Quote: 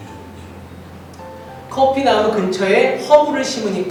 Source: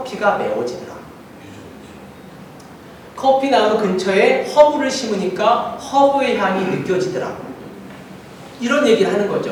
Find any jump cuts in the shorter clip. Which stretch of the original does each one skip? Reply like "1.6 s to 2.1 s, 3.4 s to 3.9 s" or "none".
none